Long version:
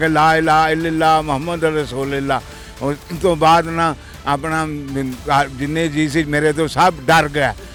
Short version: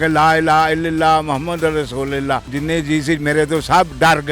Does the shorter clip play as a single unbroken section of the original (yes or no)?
no